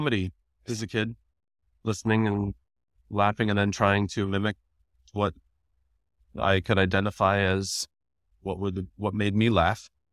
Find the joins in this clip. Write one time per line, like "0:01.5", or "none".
none